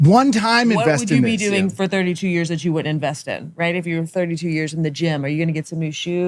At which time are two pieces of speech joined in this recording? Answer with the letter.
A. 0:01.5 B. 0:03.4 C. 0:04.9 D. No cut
D